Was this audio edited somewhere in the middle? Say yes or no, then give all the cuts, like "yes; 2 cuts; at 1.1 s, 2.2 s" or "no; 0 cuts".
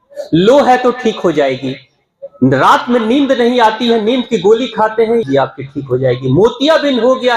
yes; 1 cut; at 5.2 s